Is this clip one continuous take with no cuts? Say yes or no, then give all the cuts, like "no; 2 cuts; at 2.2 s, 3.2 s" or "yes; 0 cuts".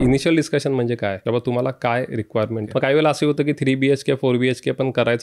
no; 2 cuts; at 1.2 s, 2.7 s